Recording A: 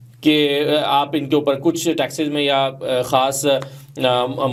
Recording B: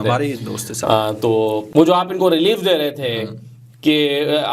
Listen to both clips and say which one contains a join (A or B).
B